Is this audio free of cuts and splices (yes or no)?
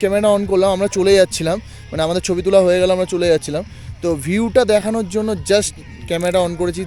yes